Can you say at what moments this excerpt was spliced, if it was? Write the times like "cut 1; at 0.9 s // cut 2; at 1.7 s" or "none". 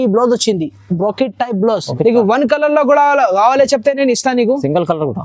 cut 1; at 1.9 s